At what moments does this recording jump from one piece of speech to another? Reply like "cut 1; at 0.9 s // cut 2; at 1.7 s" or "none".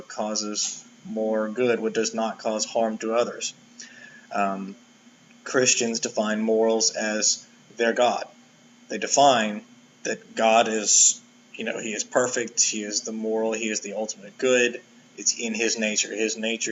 cut 1; at 9.1 s